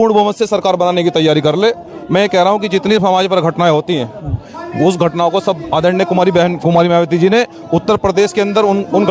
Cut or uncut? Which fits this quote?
uncut